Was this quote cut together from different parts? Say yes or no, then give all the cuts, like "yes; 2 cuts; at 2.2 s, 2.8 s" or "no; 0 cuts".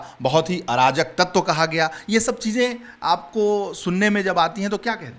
no; 0 cuts